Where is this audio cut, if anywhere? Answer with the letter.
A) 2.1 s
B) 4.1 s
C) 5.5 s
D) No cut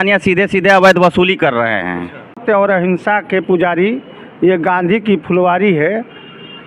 A